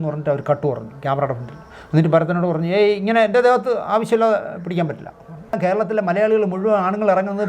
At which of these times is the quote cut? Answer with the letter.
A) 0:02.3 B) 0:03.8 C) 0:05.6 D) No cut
C